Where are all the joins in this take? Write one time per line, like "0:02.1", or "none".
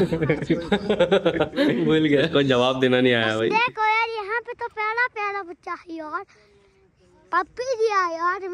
0:03.5